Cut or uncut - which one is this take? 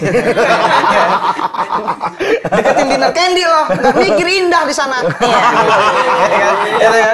uncut